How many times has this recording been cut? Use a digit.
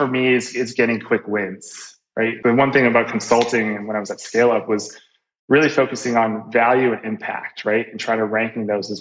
1